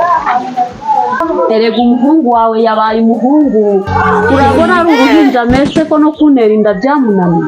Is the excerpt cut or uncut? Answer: cut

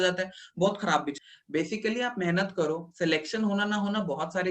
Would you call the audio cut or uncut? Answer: cut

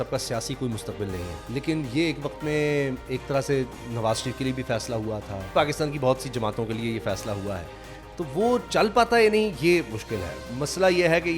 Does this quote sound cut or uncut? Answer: cut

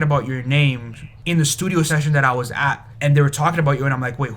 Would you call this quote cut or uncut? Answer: cut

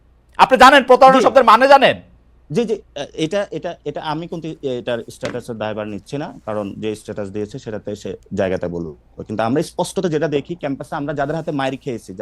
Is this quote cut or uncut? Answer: uncut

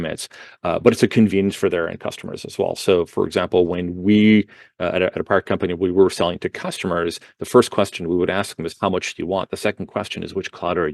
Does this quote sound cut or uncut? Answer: uncut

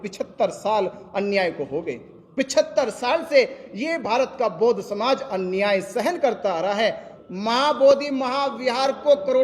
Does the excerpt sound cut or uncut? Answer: cut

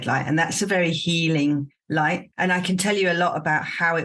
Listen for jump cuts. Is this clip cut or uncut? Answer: cut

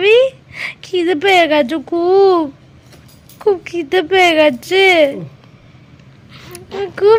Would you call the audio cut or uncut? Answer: uncut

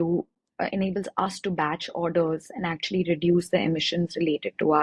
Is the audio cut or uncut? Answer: uncut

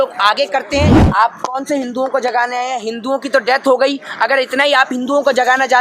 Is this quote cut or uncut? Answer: cut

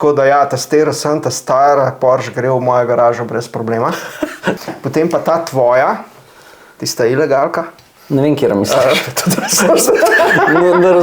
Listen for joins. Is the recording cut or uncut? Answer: cut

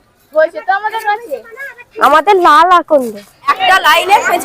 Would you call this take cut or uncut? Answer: cut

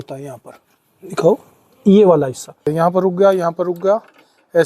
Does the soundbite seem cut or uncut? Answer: cut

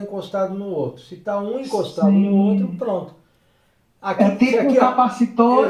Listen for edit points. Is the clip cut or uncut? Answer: uncut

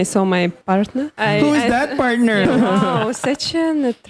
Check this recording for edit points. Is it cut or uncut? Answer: cut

